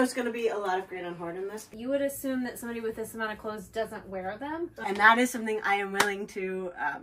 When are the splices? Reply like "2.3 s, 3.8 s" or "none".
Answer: 1.7 s, 4.8 s